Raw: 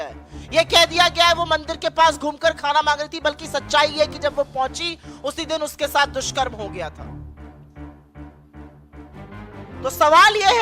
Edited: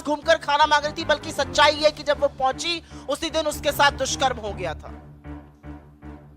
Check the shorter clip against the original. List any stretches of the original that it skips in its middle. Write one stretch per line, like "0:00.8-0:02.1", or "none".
0:07.0-0:07.3